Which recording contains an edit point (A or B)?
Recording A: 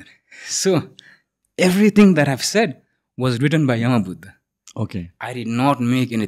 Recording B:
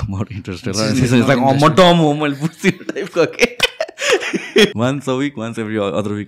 B